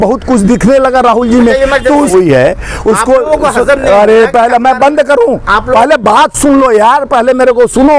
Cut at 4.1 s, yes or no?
no